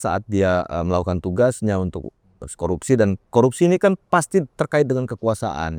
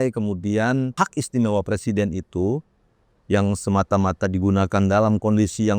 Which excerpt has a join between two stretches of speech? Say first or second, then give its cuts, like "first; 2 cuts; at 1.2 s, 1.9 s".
second; 1 cut; at 0.9 s